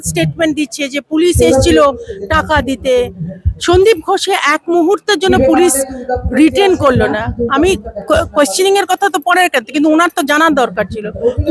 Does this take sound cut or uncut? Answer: uncut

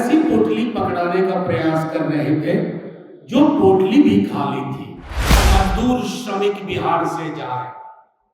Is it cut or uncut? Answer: cut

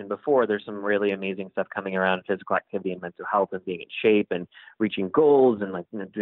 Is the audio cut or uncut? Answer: uncut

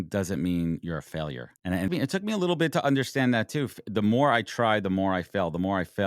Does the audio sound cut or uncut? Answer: cut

